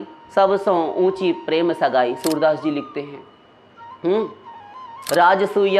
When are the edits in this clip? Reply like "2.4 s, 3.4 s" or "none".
none